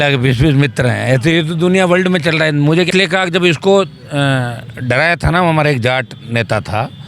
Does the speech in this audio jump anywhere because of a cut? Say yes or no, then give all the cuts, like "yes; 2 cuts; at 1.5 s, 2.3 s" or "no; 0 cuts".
yes; 1 cut; at 2.9 s